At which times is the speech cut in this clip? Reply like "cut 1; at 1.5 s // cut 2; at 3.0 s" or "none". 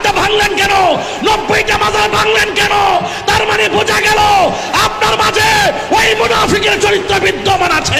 none